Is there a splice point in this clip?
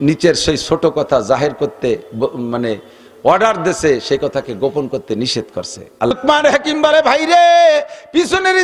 yes; 1 cut; at 6.1 s

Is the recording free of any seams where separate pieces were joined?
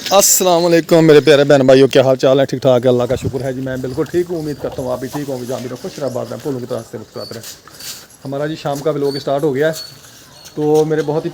yes; 0 cuts

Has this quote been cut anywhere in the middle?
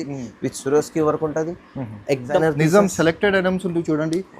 yes; 1 cut; at 2.4 s

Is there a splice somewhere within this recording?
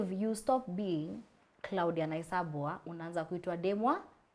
no; 0 cuts

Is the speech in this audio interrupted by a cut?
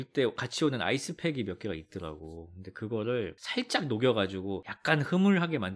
no; 0 cuts

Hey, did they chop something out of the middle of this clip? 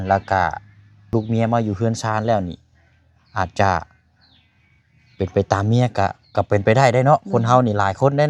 yes; 1 cut; at 1.1 s

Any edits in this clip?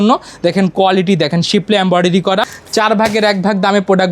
yes; 1 cut; at 2.6 s

